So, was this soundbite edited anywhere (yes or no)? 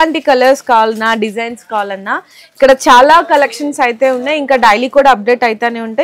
no